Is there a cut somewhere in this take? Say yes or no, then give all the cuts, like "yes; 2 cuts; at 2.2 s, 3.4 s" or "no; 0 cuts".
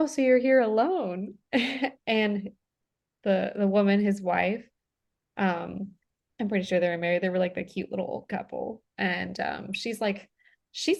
no; 0 cuts